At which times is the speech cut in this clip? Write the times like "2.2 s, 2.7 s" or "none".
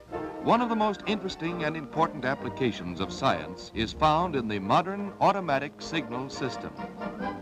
4.9 s